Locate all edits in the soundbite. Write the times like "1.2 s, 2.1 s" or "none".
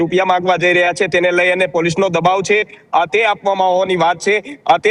none